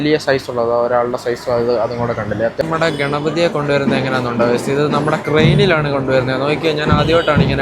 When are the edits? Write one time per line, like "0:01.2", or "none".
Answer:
0:02.6